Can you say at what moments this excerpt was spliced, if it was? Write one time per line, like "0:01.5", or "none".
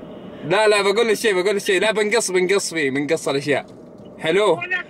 none